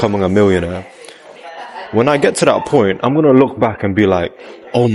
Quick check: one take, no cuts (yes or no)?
yes